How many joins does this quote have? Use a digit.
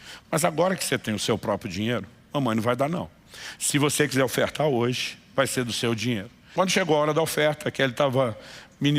1